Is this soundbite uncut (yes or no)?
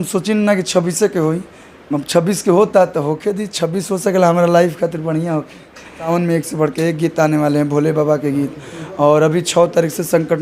no